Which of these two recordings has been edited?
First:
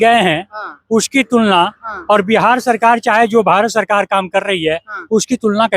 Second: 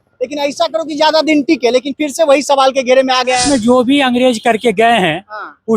second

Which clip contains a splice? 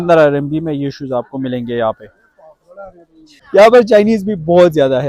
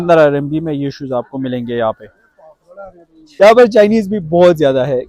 second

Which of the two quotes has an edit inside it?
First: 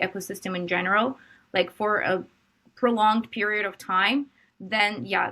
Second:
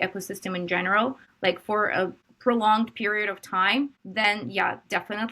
second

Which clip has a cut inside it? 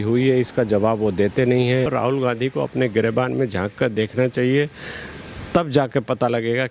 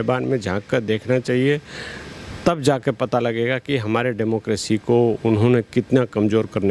first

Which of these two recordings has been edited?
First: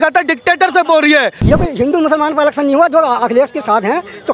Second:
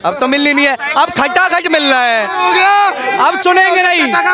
first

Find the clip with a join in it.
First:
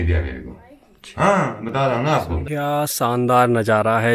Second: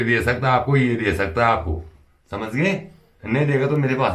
first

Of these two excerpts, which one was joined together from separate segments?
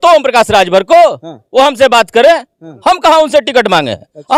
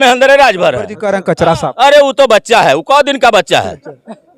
second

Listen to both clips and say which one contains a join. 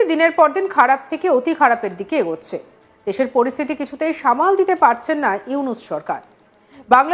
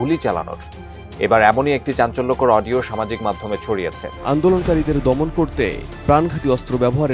second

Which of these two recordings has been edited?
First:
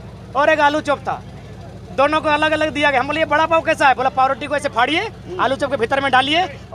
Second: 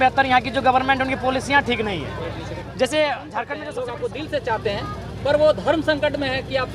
second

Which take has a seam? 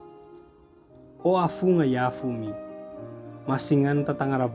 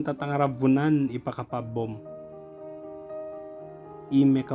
first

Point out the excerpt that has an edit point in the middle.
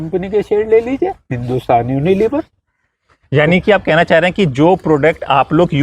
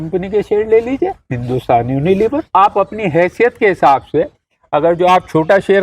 second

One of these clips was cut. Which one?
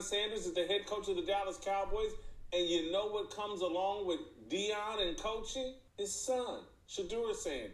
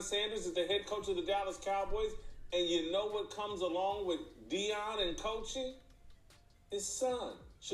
first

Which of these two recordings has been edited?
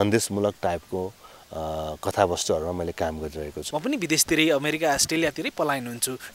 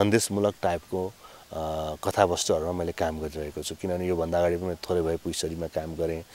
first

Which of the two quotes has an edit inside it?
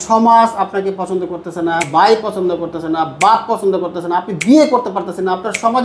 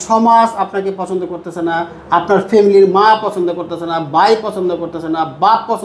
first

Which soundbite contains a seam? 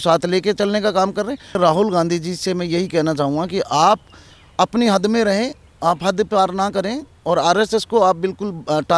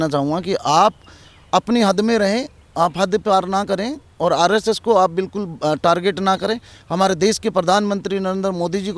first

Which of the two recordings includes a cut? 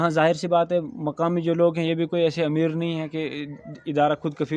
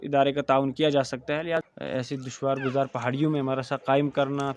second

